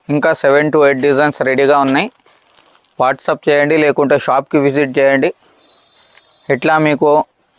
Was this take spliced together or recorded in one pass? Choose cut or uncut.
uncut